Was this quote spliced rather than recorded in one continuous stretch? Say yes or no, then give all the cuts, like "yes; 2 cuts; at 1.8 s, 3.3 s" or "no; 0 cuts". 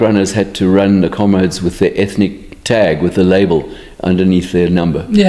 no; 0 cuts